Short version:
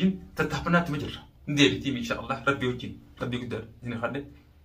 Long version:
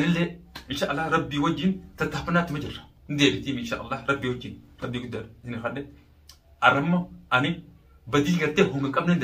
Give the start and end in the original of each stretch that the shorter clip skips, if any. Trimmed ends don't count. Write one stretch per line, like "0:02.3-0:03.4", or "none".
none